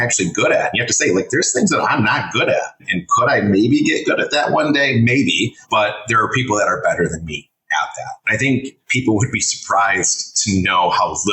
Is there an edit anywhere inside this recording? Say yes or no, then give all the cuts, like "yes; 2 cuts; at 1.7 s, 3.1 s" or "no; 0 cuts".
yes; 3 cuts; at 2.9 s, 5.6 s, 8.2 s